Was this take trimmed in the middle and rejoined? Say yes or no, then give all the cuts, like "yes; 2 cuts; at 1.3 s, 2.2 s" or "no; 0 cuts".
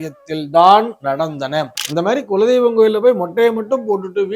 yes; 1 cut; at 1.8 s